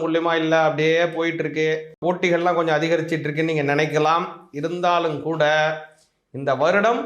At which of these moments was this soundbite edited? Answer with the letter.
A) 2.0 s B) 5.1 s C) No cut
A